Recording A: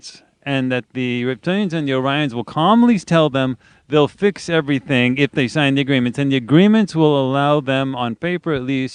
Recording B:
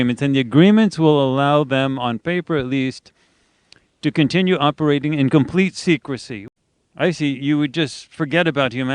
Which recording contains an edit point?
B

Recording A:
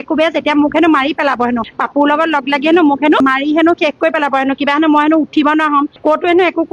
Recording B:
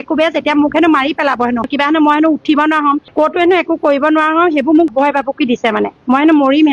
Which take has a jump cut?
B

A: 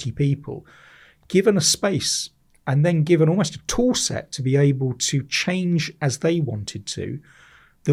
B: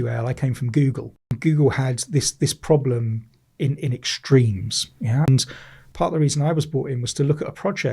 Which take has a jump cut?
B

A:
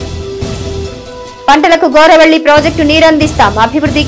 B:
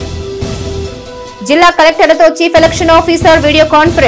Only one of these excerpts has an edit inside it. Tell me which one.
B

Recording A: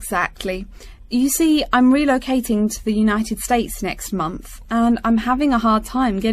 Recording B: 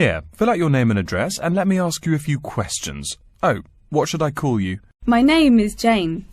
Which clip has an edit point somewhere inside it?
B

